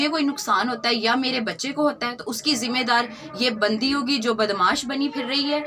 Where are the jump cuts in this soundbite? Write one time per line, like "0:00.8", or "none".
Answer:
none